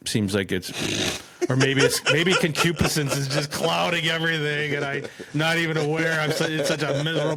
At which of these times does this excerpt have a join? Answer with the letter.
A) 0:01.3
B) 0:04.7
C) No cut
C